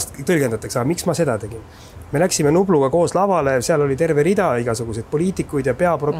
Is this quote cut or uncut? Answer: uncut